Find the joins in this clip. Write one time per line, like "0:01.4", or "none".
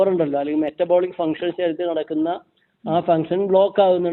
none